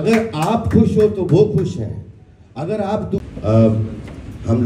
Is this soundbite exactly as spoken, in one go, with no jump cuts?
no; 1 cut; at 3.2 s

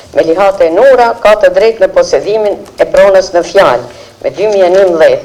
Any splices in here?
no; 0 cuts

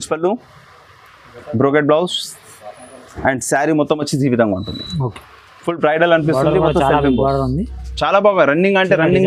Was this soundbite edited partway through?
no; 0 cuts

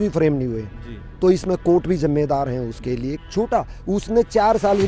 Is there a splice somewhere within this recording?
yes; 1 cut; at 3.2 s

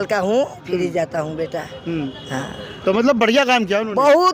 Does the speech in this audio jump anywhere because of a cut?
no; 0 cuts

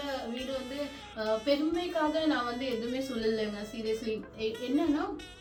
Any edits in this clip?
no; 0 cuts

